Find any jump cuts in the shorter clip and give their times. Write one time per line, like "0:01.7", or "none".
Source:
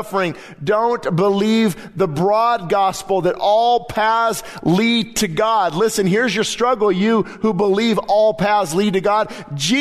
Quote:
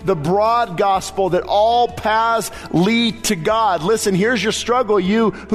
none